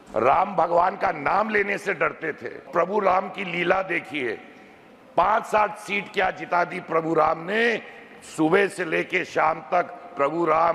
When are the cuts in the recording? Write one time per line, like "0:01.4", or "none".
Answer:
0:02.7